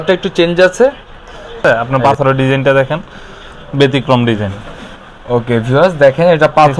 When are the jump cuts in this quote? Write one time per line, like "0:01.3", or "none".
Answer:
0:01.6